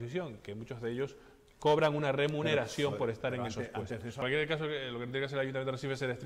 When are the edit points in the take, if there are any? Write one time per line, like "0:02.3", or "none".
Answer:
0:04.2